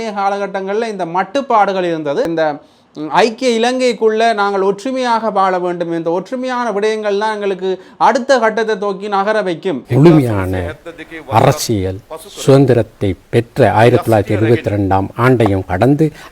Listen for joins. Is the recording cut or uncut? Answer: cut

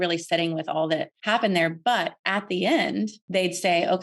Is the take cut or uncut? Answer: cut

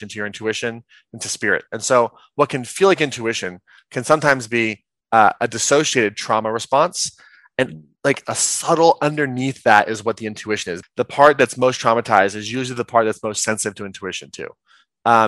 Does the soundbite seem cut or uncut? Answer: cut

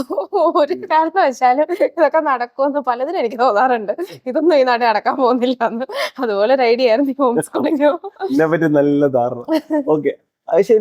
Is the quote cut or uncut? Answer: uncut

